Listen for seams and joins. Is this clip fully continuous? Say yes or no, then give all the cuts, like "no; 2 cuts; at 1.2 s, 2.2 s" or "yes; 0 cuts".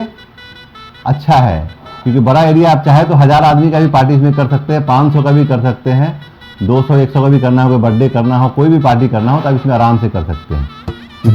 yes; 0 cuts